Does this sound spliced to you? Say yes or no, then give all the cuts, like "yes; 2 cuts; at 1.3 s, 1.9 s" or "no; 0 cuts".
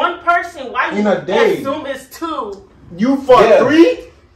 no; 0 cuts